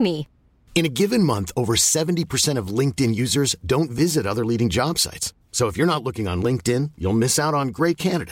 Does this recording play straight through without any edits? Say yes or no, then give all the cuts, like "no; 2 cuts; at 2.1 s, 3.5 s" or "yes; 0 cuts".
yes; 0 cuts